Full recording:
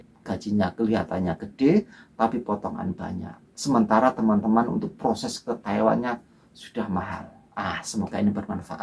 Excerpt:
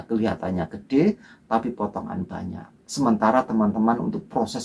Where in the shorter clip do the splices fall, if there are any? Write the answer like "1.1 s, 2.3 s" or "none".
none